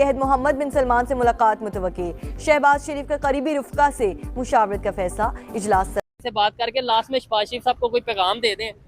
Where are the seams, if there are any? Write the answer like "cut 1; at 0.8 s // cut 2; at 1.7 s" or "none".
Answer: cut 1; at 6.0 s